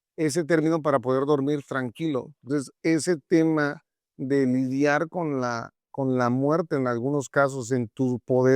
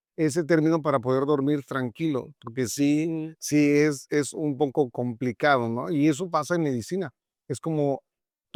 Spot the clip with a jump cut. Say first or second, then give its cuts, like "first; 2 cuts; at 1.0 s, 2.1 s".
first; 1 cut; at 2.5 s